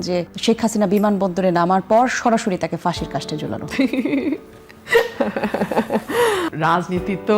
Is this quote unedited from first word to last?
no; 1 cut; at 6.5 s

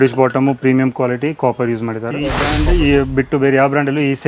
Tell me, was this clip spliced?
yes; 1 cut; at 2.4 s

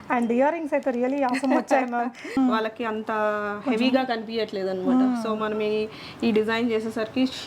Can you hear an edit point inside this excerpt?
yes; 1 cut; at 2.4 s

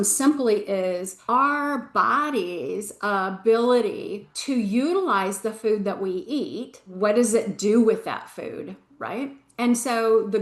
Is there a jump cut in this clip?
yes; 3 cuts; at 1.1 s, 4.3 s, 6.8 s

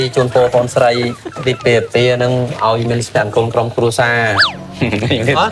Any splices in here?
yes; 1 cut; at 4.4 s

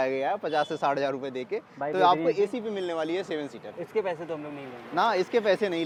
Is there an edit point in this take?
no; 0 cuts

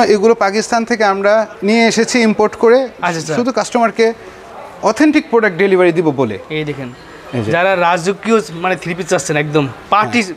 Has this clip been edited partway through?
no; 0 cuts

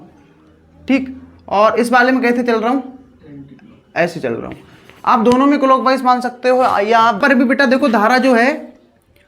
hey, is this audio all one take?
no; 1 cut; at 7.2 s

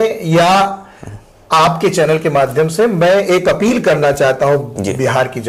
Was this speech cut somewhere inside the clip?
no; 0 cuts

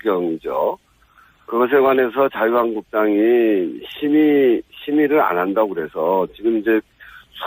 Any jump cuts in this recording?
yes; 1 cut; at 2.4 s

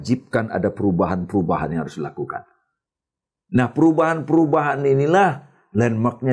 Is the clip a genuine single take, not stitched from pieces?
yes; 0 cuts

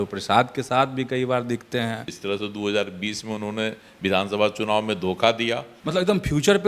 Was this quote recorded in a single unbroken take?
no; 2 cuts; at 2.1 s, 5.7 s

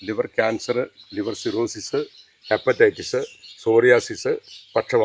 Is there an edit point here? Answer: no; 0 cuts

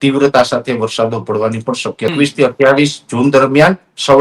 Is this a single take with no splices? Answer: no; 1 cut; at 2.1 s

